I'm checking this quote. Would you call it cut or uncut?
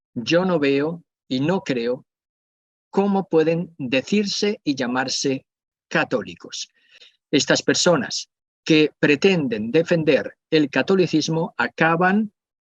cut